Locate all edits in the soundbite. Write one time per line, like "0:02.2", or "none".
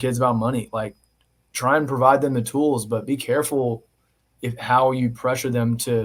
none